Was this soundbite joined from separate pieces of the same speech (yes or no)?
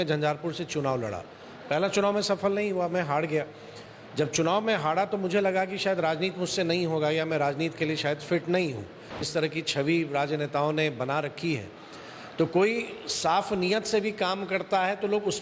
yes